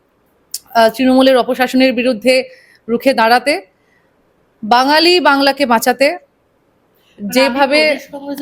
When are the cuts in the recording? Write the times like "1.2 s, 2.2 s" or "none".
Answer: none